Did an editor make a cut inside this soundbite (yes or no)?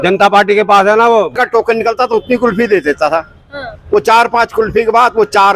yes